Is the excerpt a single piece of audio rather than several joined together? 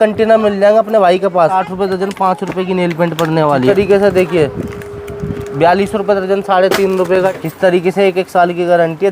no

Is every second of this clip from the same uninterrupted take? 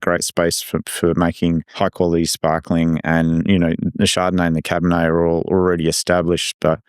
no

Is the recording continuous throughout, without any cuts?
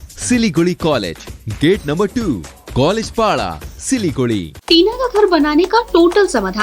no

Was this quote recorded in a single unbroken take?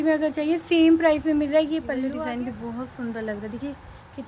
no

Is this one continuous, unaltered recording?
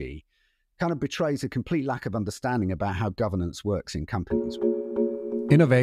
no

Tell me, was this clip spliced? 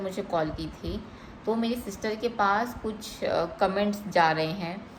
no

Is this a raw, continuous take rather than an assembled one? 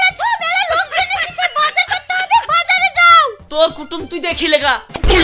yes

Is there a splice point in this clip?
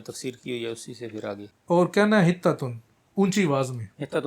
yes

